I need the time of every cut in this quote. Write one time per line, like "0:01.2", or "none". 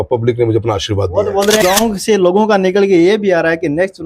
0:01.6